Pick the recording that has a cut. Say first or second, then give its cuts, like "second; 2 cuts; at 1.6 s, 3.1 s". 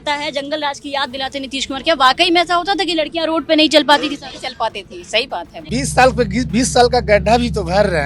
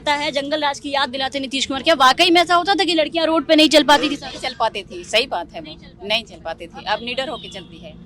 first; 1 cut; at 5.6 s